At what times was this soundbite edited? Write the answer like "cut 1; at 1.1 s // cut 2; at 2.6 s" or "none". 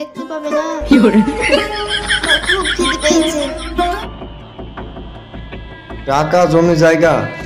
cut 1; at 4.0 s